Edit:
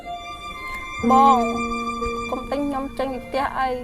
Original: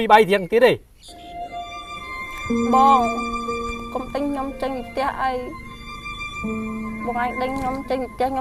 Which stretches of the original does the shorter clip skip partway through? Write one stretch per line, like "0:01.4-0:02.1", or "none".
0:02.5-0:02.7